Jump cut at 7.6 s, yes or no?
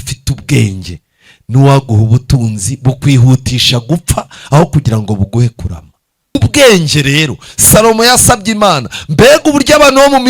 no